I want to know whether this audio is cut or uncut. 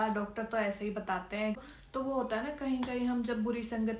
cut